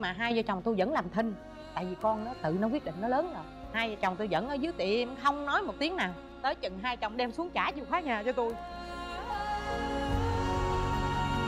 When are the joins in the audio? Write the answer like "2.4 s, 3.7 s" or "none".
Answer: none